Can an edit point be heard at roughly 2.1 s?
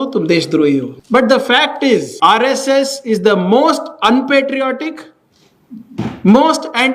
yes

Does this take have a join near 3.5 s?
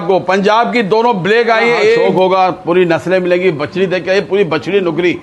no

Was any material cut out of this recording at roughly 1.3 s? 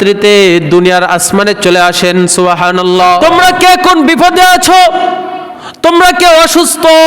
no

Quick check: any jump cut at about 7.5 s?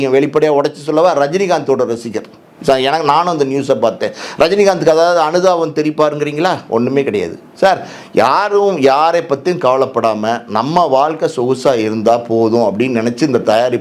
no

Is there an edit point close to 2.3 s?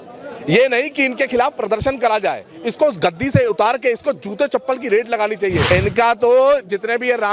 no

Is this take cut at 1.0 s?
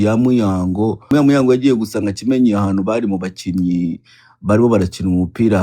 yes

